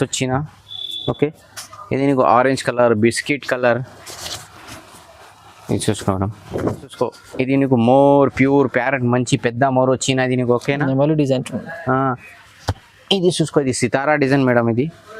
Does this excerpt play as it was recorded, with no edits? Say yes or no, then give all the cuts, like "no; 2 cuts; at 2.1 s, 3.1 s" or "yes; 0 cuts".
no; 1 cut; at 6.9 s